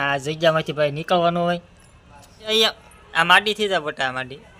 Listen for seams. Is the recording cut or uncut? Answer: cut